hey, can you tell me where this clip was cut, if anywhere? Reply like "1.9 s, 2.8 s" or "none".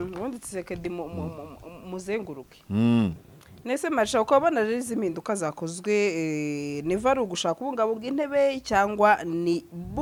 none